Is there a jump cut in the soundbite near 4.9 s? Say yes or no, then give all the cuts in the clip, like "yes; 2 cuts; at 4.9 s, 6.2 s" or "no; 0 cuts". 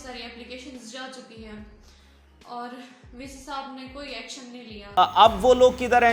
yes; 1 cut; at 4.9 s